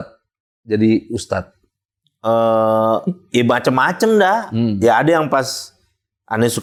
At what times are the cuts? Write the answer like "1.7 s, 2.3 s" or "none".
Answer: none